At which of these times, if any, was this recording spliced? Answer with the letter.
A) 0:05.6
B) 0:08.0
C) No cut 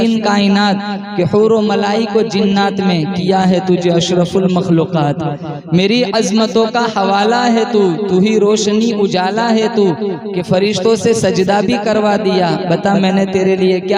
C